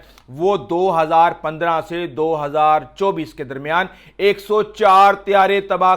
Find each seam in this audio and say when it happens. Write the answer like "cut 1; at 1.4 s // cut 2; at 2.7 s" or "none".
none